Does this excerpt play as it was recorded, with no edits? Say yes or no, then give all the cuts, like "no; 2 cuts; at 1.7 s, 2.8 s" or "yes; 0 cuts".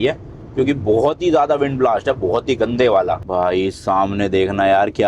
no; 1 cut; at 3.2 s